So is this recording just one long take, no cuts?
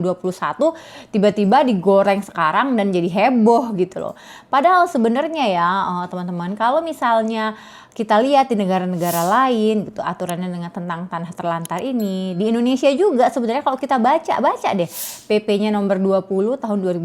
yes; 0 cuts

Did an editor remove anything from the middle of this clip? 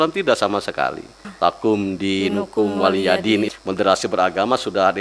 yes; 2 cuts; at 1.3 s, 3.5 s

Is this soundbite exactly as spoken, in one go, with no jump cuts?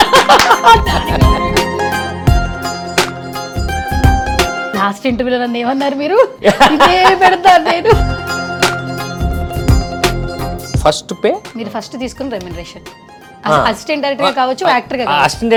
yes; 0 cuts

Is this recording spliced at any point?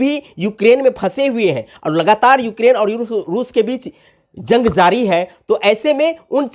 no; 0 cuts

